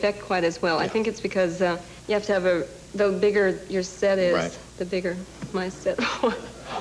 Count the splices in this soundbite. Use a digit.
3